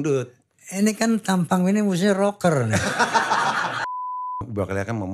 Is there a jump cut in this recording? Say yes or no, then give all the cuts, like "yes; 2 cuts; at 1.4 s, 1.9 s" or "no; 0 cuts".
yes; 1 cut; at 4.0 s